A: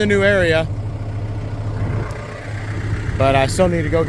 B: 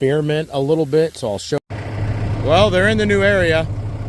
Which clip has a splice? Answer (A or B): B